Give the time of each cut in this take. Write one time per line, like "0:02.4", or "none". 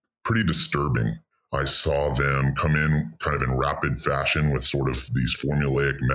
0:01.3